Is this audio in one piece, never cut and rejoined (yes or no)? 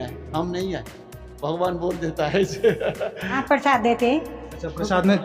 no